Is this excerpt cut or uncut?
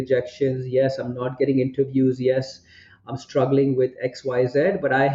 uncut